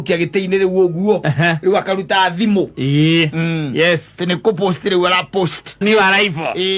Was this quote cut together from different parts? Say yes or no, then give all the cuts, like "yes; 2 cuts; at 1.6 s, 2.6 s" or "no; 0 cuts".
yes; 1 cut; at 5.8 s